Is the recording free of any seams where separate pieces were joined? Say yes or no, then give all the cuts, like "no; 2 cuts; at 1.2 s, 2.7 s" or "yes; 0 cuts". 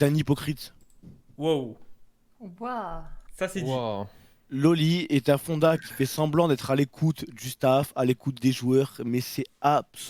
yes; 0 cuts